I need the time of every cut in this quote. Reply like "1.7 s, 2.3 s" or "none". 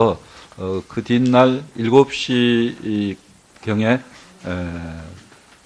4.8 s